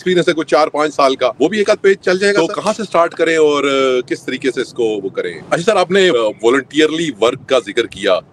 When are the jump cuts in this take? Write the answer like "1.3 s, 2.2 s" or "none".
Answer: 1.3 s, 2.4 s, 5.4 s, 6.1 s